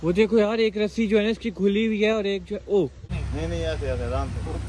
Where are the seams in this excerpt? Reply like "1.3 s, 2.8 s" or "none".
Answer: 3.1 s